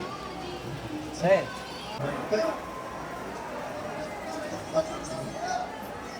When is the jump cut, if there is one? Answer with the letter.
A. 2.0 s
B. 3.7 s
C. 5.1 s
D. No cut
A